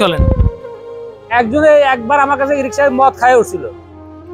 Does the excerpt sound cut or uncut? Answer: cut